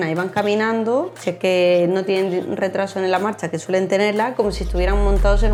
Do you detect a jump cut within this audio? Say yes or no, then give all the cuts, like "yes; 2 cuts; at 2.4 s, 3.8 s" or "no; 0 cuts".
no; 0 cuts